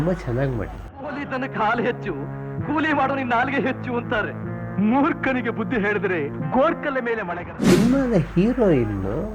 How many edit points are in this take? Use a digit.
2